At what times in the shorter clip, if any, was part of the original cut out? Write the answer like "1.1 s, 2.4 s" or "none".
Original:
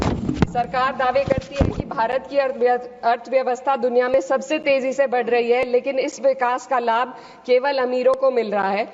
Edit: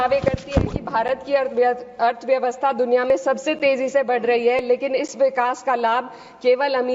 none